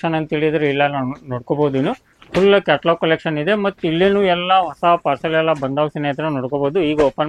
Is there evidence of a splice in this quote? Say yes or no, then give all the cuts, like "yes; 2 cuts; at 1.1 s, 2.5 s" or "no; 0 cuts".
no; 0 cuts